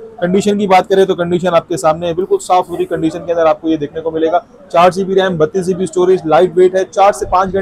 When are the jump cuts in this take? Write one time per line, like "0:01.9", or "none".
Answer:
none